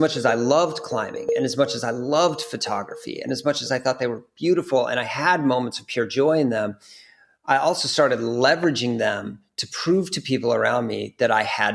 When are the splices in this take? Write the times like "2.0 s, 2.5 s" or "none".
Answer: none